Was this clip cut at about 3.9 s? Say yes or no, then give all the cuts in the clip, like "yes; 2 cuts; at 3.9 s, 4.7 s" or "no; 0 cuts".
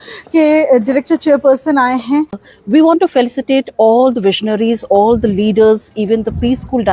no; 1 cut; at 2.4 s